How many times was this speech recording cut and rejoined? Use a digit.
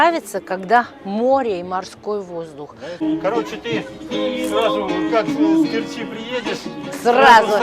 1